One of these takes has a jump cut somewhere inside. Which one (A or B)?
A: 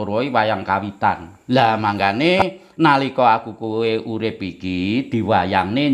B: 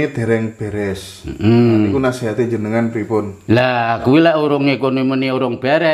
A